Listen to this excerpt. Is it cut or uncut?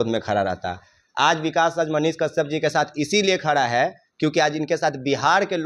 uncut